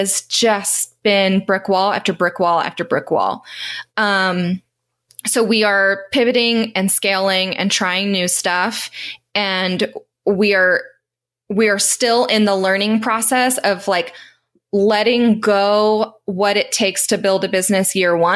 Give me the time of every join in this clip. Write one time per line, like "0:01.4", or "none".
none